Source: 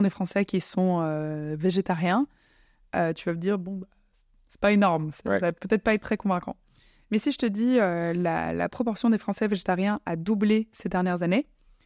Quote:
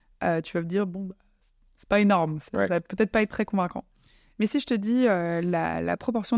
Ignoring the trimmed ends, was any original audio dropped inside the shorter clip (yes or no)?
no